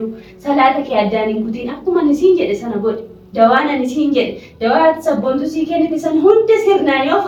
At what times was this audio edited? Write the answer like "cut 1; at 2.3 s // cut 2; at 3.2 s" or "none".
none